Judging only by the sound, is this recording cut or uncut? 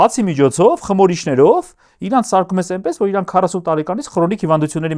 uncut